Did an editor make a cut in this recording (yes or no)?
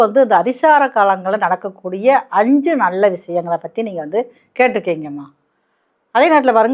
no